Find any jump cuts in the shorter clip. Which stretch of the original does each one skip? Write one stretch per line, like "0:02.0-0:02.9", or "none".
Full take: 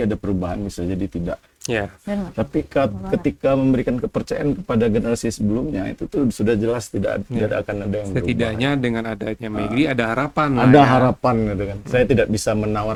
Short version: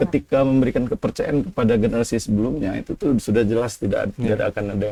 none